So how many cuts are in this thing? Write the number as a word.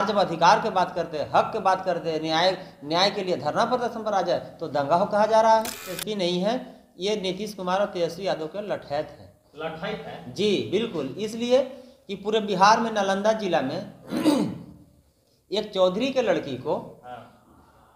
one